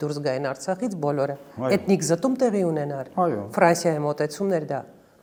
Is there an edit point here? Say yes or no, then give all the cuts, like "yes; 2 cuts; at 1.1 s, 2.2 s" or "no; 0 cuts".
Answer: no; 0 cuts